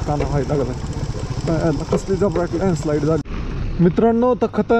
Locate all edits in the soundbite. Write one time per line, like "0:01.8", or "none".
0:03.2

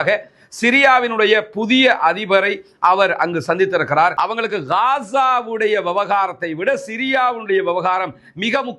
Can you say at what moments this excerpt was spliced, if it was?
0:04.1

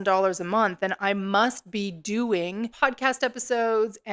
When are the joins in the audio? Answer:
0:02.7

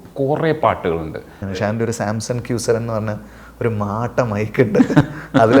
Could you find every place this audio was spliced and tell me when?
0:01.6

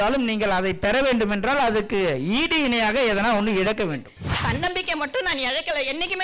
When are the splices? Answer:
0:04.2

